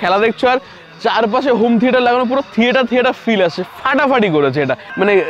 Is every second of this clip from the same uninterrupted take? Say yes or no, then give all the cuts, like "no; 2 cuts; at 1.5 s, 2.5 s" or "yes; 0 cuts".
yes; 0 cuts